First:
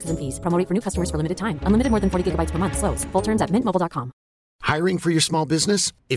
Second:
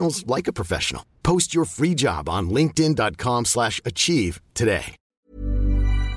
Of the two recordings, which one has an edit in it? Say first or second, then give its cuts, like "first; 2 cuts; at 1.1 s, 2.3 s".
second; 1 cut; at 5.2 s